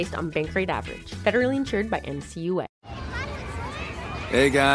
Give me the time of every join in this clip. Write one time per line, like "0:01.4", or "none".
0:02.7